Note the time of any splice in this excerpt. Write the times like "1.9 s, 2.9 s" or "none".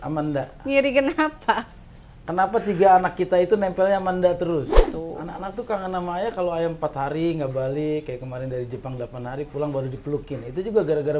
4.8 s